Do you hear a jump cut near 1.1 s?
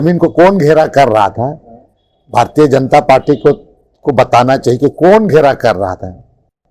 no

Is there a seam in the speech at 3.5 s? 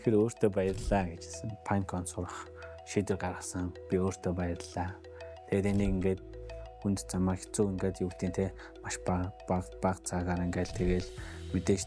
no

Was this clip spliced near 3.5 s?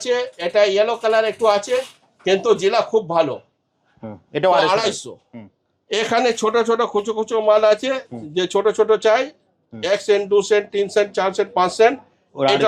no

